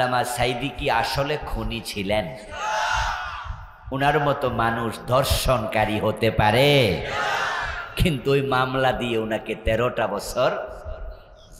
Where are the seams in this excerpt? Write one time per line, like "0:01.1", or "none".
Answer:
none